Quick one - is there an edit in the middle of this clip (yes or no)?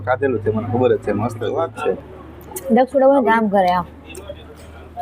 yes